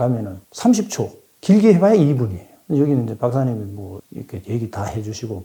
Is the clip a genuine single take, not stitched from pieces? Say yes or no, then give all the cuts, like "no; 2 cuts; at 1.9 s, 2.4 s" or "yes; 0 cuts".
yes; 0 cuts